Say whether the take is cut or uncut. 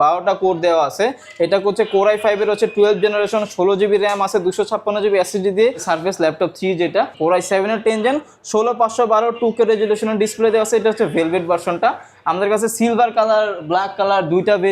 cut